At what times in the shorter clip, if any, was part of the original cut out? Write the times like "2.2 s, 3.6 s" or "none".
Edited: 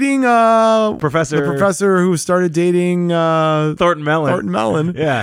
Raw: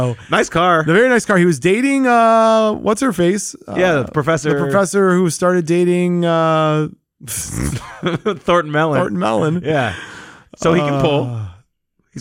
1.0 s, 3.7 s